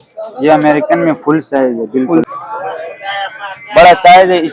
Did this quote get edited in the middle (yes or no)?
yes